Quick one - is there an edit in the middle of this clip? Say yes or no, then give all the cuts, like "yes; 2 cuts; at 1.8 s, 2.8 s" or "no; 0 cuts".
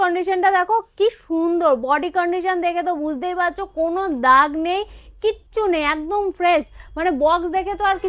no; 0 cuts